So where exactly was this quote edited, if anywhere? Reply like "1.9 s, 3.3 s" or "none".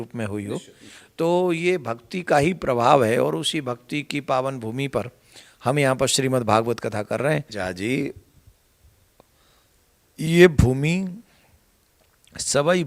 7.6 s